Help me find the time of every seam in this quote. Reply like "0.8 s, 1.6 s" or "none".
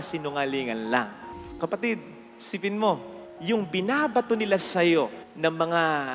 1.6 s